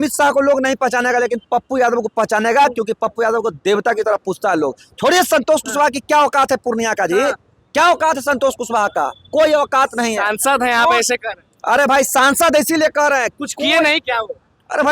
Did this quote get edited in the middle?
no; 0 cuts

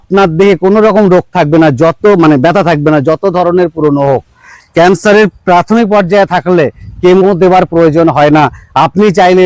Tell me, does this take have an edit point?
yes; 1 cut; at 4.5 s

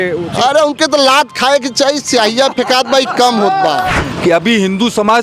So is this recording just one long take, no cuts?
no; 1 cut; at 3.9 s

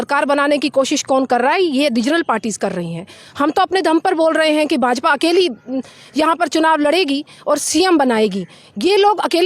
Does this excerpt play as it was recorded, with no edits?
yes; 0 cuts

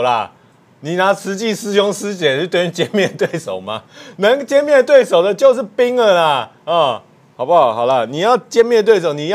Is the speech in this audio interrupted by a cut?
no; 0 cuts

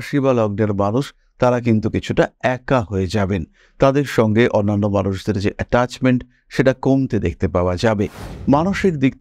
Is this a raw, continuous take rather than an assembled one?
no; 1 cut; at 8.3 s

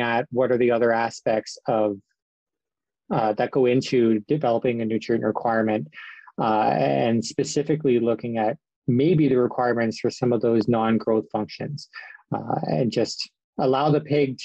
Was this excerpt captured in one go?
yes; 0 cuts

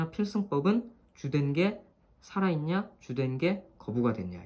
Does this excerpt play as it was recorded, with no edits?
yes; 0 cuts

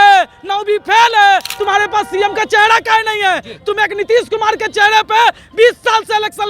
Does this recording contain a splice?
yes; 1 cut; at 1.5 s

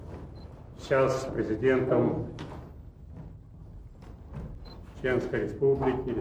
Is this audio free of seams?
yes; 0 cuts

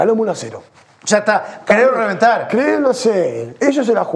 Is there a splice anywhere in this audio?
no; 0 cuts

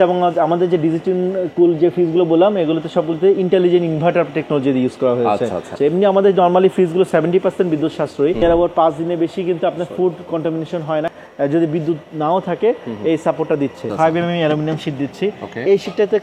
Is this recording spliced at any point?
yes; 4 cuts; at 5.7 s, 8.4 s, 11.1 s, 13.9 s

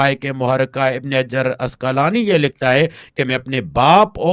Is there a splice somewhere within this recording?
no; 0 cuts

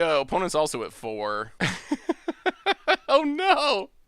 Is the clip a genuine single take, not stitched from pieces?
no; 1 cut; at 1.5 s

